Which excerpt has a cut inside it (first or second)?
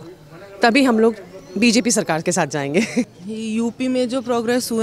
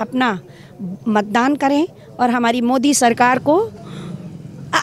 first